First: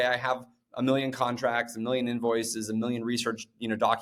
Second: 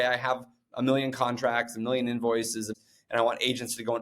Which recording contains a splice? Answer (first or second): second